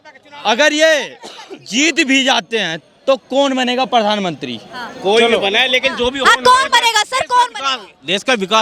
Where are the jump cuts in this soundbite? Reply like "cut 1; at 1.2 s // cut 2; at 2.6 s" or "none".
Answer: none